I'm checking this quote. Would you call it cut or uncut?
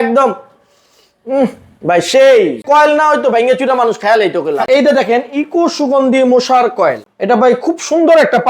cut